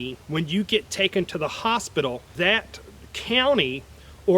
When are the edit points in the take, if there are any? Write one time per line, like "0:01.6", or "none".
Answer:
0:02.3